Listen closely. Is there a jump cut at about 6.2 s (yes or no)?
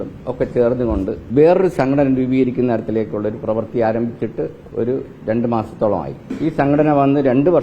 yes